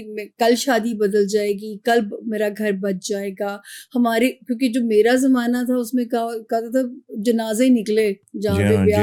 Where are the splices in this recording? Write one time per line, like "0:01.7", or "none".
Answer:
none